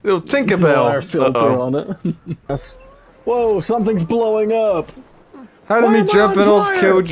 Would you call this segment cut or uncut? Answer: cut